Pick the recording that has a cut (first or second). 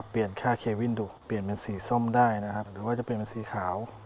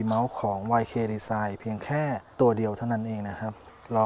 first